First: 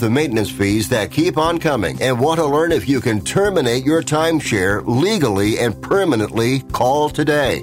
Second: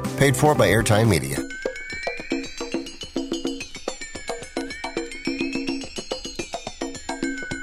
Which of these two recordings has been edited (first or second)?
second